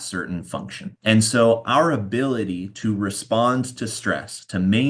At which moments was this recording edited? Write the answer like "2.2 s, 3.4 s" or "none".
none

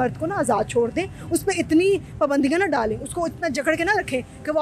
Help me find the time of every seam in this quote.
none

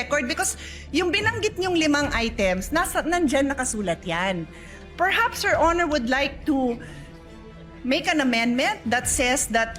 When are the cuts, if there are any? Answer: 4.8 s

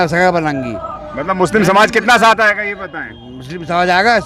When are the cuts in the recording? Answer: none

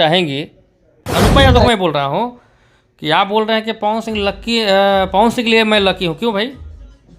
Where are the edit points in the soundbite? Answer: 1.0 s

